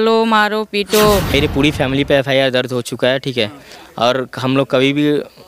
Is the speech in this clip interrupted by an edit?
yes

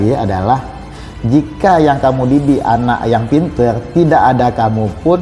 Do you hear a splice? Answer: no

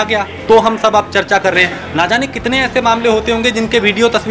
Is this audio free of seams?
yes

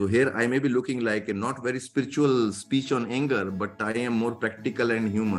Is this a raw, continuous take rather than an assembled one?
yes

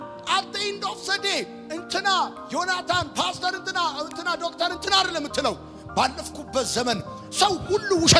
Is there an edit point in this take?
no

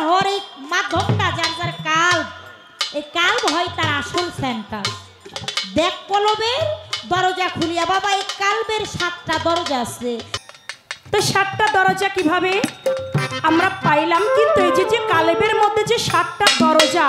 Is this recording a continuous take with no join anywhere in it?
no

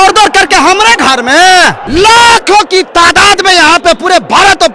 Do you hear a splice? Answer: yes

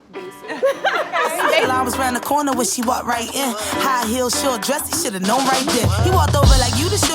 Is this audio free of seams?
no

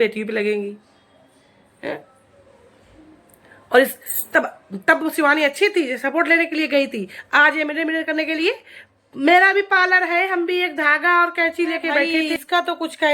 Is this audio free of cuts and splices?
no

